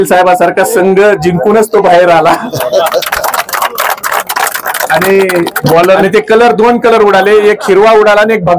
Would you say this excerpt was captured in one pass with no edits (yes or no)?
no